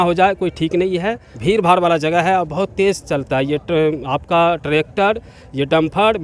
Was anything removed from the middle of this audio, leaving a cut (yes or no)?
yes